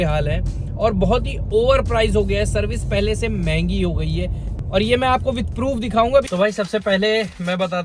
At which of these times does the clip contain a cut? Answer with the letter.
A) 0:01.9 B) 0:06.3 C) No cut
B